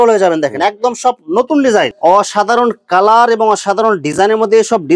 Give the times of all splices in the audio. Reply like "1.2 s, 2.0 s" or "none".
1.9 s